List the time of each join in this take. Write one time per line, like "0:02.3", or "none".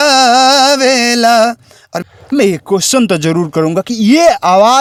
none

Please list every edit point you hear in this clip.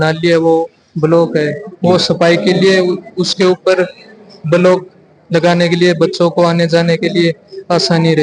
none

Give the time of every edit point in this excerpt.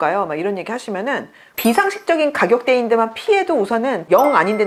none

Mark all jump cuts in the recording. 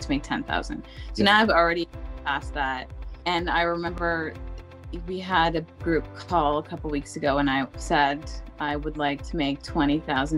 0:03.1

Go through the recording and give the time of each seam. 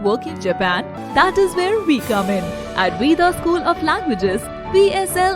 0:01.0

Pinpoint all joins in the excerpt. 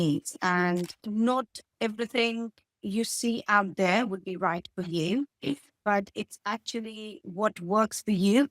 0:01.0

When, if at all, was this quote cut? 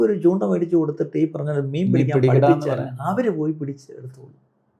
none

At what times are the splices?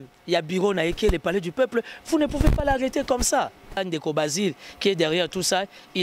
0:03.8

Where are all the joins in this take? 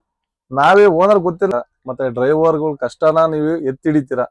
0:01.5

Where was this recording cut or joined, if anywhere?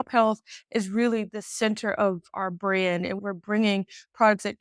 0:03.2

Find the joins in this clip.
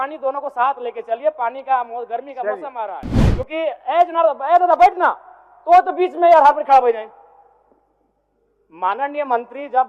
0:03.1

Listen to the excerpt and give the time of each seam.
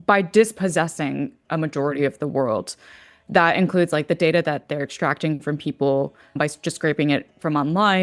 none

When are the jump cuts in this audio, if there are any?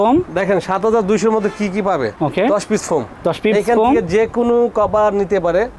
none

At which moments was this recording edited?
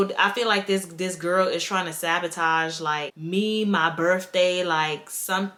none

